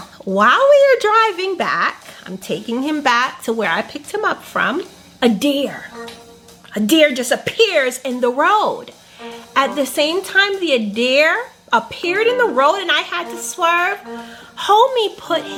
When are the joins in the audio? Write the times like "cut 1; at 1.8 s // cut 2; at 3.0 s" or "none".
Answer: none